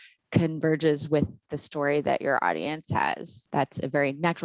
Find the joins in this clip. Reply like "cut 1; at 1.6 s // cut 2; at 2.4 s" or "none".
cut 1; at 3.4 s